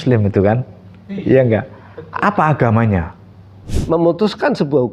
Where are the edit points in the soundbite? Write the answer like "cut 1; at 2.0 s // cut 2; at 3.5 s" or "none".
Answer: cut 1; at 3.7 s